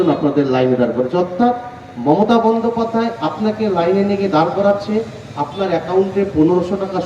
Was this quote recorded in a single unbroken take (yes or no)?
yes